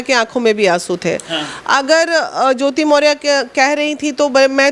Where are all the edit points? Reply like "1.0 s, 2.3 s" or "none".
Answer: none

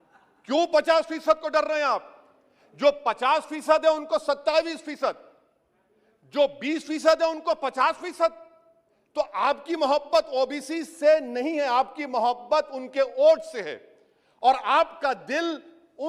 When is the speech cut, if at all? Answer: none

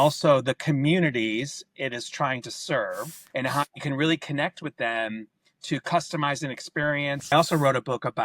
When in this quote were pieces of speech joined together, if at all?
3.2 s, 7.3 s

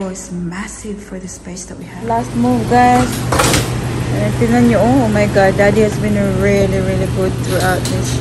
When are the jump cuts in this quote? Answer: 1.9 s

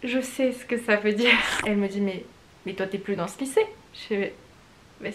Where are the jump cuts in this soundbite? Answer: 1.5 s

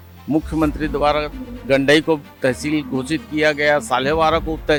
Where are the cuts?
none

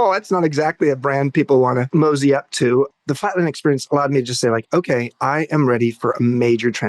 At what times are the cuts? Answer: 1.9 s, 2.9 s

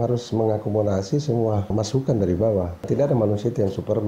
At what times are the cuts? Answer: 1.7 s, 2.9 s

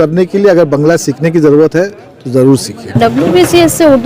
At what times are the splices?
3.0 s

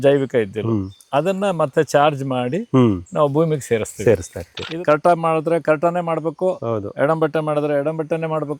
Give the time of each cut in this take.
4.6 s

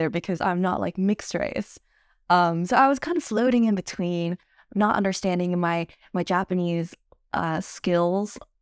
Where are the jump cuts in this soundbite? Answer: none

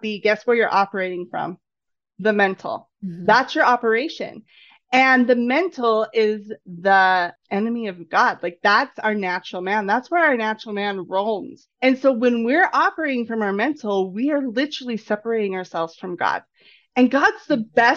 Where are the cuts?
7.4 s, 11.6 s

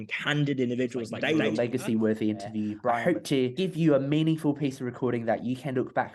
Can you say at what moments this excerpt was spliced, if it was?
1.3 s, 3.1 s

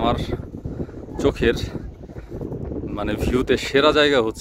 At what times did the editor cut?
none

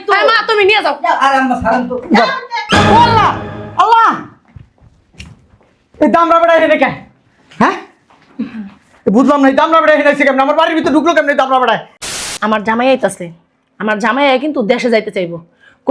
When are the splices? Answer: 11.9 s

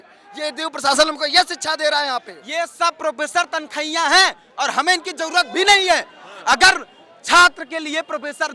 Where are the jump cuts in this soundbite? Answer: 2.4 s

